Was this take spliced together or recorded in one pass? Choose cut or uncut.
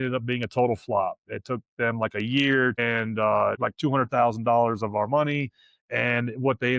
cut